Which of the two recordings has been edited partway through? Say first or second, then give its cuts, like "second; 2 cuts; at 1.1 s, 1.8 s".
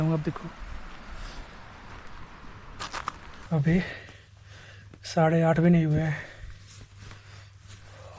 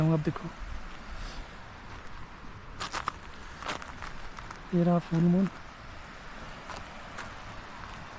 first; 1 cut; at 3.4 s